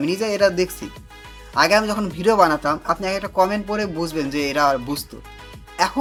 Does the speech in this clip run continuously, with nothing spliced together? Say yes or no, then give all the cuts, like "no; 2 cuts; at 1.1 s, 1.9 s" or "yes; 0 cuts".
yes; 0 cuts